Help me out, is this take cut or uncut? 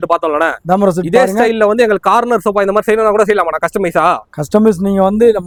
uncut